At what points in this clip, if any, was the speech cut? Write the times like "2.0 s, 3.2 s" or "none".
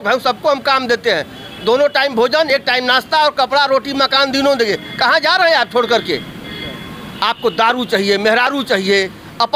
none

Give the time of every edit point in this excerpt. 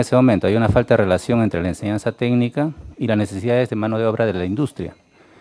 2.2 s

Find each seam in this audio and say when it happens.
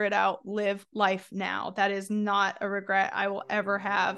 none

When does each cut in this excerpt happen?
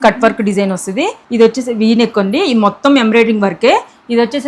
1.2 s

